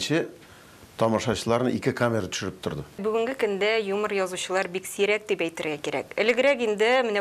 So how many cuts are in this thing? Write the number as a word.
one